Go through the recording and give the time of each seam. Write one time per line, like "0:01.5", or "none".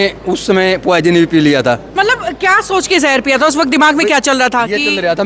0:01.9